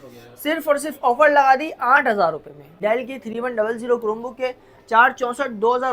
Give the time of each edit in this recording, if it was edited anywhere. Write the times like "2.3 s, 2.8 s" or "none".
2.7 s